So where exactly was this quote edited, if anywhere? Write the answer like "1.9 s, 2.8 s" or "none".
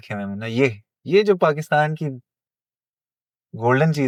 none